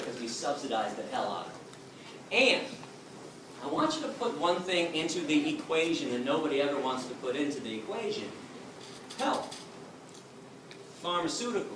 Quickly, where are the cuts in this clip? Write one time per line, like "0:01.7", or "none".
none